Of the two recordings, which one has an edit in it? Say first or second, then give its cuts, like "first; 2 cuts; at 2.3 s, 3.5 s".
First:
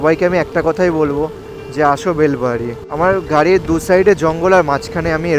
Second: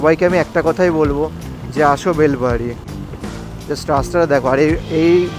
first; 1 cut; at 2.8 s